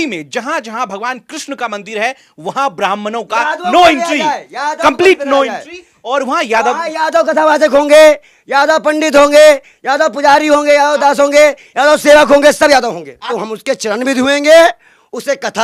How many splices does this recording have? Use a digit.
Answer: 1